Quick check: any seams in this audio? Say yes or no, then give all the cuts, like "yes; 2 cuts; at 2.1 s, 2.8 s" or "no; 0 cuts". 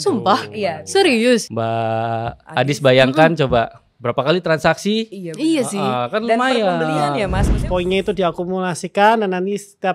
yes; 2 cuts; at 1.5 s, 7.5 s